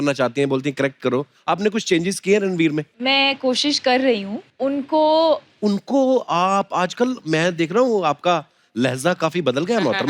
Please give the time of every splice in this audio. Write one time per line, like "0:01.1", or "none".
0:02.9
0:04.4
0:05.5